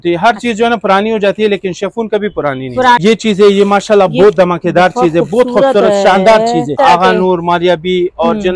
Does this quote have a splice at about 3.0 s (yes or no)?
yes